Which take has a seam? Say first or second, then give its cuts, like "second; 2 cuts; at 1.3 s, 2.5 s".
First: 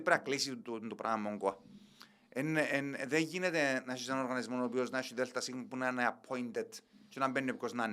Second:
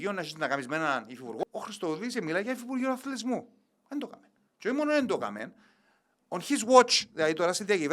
second; 1 cut; at 1.4 s